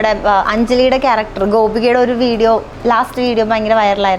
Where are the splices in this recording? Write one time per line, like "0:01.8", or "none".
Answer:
0:02.7